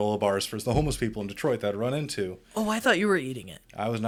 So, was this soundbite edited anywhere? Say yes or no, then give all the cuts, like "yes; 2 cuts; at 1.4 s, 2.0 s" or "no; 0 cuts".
no; 0 cuts